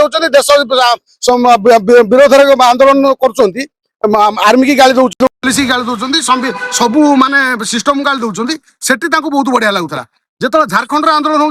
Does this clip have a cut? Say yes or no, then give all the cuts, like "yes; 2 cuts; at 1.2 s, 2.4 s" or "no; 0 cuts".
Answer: no; 0 cuts